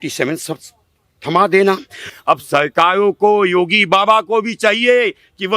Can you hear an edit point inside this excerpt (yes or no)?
yes